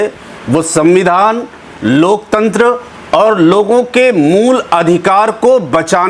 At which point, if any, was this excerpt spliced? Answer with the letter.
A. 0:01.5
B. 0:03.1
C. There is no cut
C